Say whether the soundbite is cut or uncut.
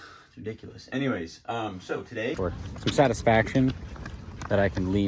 cut